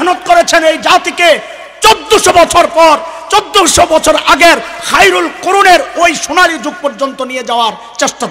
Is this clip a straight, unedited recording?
yes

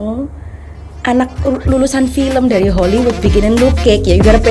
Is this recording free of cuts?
yes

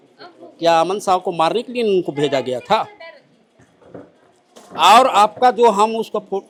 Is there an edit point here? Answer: no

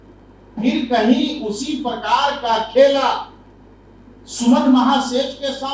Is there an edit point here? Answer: no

